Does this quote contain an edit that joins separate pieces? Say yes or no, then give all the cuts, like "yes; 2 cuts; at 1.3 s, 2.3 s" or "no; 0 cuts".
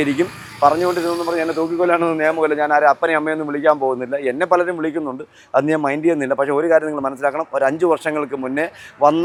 no; 0 cuts